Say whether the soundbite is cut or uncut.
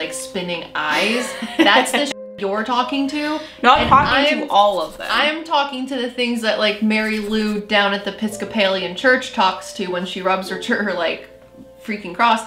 uncut